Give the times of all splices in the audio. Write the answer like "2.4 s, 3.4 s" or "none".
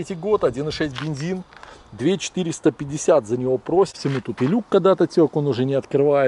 3.9 s

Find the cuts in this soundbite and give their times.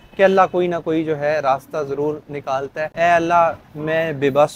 2.9 s

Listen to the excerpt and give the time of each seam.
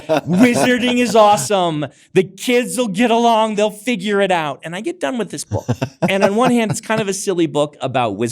6.1 s

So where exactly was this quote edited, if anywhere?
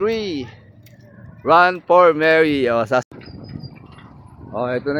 3.0 s

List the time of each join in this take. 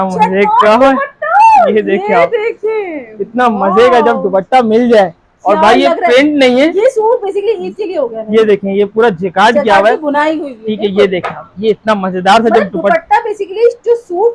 none

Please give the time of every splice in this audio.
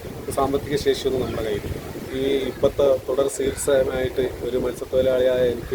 2.0 s

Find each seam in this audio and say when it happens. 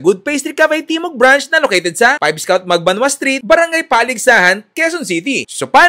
none

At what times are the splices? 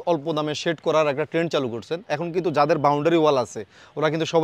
none

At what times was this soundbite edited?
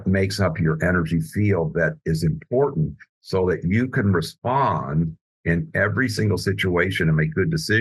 none

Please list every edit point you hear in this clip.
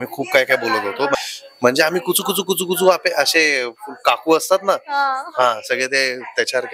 1.1 s

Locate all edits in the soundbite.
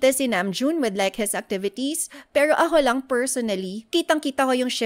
3.8 s

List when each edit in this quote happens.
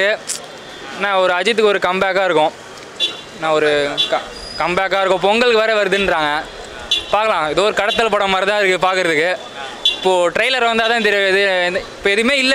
none

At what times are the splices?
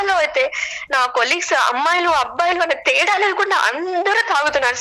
none

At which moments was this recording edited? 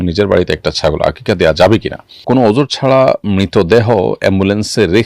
2.2 s

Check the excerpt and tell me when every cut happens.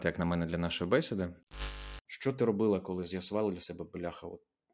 1.6 s

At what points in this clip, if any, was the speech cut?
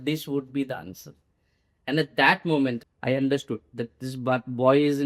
2.8 s

